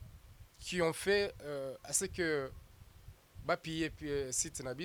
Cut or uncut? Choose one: uncut